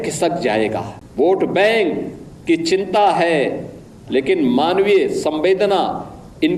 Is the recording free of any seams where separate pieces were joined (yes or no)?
no